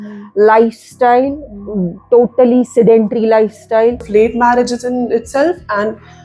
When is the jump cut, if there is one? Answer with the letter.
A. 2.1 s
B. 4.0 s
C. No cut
B